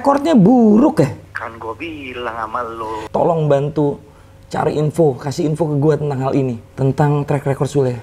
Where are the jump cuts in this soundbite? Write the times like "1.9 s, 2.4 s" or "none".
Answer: 1.3 s, 3.0 s, 6.7 s